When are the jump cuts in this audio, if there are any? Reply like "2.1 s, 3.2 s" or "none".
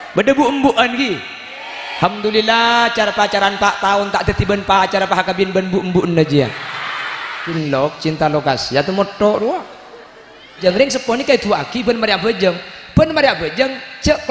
7.5 s, 10.6 s